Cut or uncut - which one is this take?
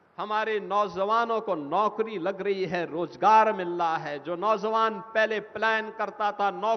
cut